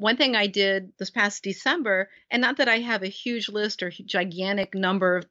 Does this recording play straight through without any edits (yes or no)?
no